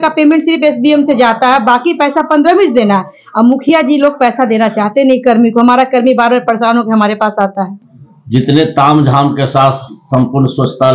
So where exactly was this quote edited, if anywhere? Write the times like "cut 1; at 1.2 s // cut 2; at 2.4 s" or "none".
none